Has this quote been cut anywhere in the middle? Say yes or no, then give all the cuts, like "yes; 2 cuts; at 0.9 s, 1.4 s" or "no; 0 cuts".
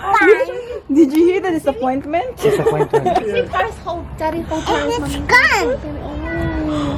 no; 0 cuts